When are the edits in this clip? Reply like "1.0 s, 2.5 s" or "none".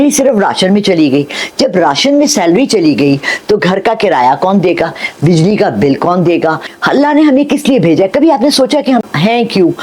6.7 s

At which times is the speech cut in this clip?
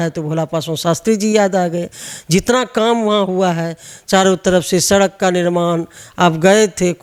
none

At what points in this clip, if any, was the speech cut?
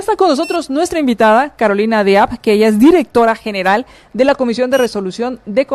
none

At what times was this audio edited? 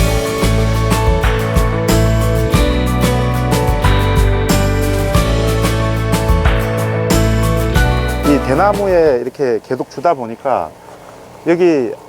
8.0 s

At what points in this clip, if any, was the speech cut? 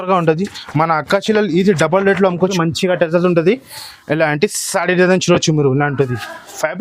2.5 s

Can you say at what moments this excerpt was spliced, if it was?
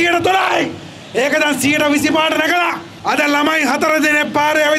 2.9 s

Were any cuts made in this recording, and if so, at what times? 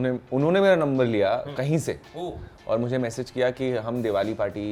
none

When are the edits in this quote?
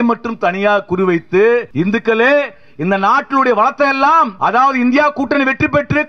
1.7 s, 4.3 s

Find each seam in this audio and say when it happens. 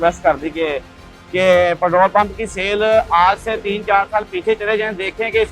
1.0 s

